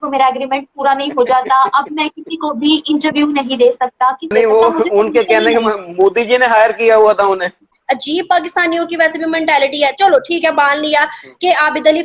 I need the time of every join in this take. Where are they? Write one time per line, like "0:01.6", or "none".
0:04.3
0:07.7